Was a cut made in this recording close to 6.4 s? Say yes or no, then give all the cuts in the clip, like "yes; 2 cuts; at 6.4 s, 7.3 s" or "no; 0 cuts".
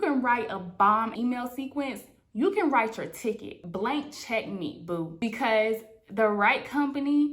no; 2 cuts; at 1.1 s, 3.6 s